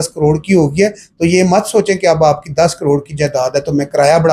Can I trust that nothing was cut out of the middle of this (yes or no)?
yes